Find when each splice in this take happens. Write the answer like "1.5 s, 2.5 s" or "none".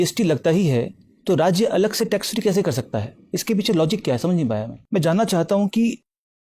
4.7 s